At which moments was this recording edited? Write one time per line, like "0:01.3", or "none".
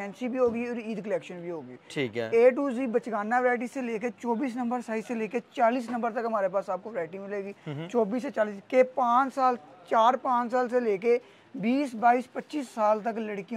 none